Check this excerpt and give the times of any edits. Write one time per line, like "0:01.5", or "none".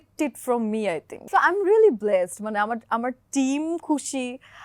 0:01.2